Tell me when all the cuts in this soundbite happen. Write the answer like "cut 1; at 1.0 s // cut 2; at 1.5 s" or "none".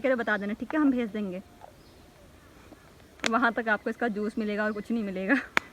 none